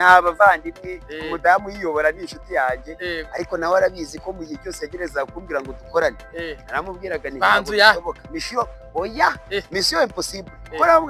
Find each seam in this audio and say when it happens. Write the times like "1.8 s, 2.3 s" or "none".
none